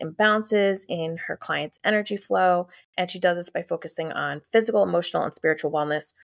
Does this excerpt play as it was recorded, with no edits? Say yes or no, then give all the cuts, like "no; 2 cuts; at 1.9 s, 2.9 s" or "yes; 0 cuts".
yes; 0 cuts